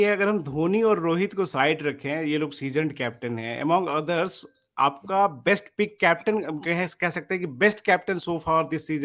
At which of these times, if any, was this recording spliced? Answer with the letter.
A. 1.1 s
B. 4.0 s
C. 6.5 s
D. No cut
D